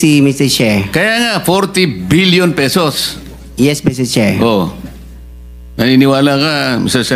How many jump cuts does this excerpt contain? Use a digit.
0